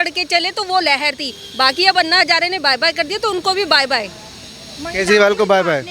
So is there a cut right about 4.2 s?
no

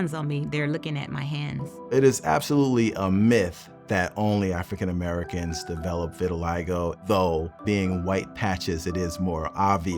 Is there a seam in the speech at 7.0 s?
yes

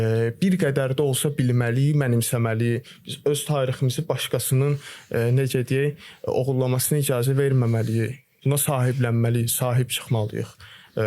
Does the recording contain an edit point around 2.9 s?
no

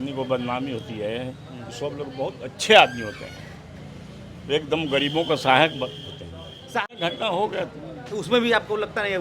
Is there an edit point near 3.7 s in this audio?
no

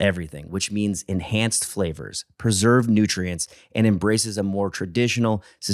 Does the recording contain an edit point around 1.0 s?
no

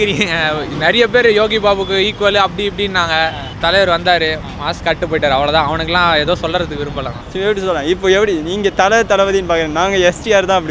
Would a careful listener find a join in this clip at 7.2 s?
yes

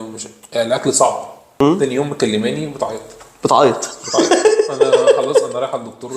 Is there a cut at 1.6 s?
yes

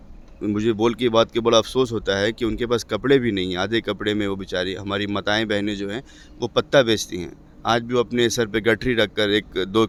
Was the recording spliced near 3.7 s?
no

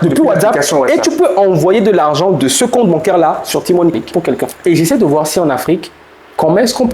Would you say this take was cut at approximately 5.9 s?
no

